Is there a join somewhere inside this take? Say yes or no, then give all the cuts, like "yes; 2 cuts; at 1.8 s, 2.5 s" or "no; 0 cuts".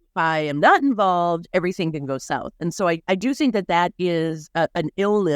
yes; 1 cut; at 3.0 s